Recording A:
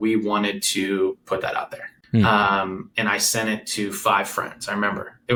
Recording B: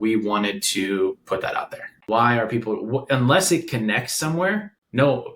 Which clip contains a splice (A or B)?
B